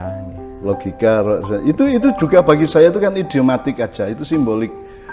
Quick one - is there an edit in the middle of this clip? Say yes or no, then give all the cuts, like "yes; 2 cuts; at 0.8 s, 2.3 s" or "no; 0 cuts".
no; 0 cuts